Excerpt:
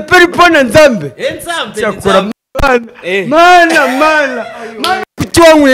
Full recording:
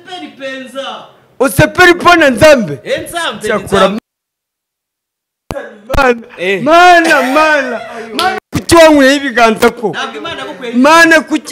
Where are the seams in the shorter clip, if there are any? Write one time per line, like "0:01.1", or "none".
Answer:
0:02.4